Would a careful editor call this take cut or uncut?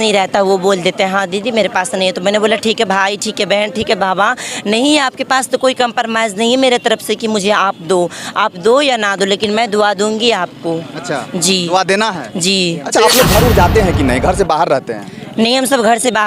cut